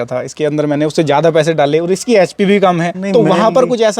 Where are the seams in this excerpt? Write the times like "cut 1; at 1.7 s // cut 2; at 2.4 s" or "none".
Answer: cut 1; at 2.9 s